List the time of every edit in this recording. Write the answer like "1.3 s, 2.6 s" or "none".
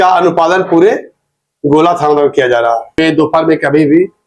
3.0 s